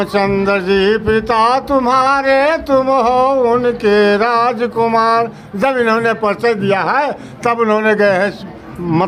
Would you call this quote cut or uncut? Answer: uncut